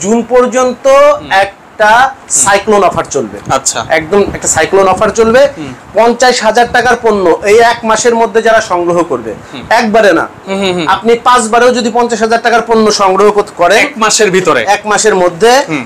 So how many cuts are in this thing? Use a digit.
0